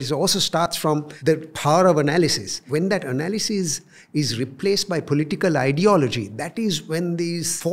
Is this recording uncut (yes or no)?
no